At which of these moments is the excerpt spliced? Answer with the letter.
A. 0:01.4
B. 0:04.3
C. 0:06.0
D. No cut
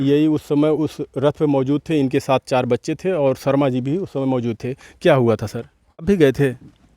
C